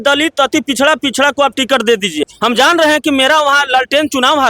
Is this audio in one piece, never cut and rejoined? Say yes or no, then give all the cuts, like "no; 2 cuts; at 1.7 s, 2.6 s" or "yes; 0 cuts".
no; 1 cut; at 2.3 s